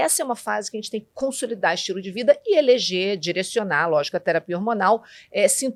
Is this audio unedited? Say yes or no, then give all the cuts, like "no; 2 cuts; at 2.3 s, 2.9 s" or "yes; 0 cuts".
yes; 0 cuts